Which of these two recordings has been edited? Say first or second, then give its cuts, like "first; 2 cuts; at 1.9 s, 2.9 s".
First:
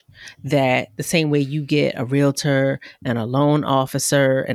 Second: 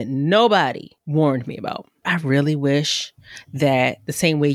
second; 2 cuts; at 0.9 s, 2.1 s